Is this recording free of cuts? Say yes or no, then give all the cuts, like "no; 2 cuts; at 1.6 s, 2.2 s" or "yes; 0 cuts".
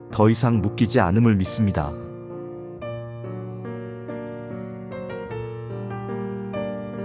no; 1 cut; at 2.3 s